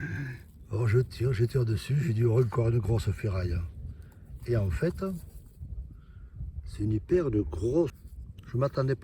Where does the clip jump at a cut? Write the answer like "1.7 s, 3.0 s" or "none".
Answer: 8.0 s